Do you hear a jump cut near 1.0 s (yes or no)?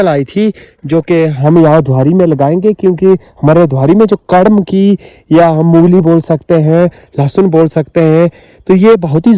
no